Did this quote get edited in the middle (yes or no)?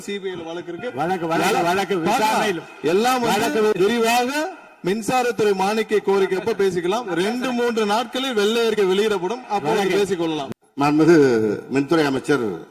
yes